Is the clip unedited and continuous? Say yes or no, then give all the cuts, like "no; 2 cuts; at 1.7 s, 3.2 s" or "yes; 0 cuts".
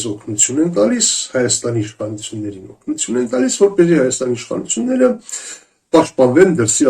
yes; 0 cuts